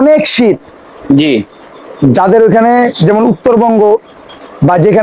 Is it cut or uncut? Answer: uncut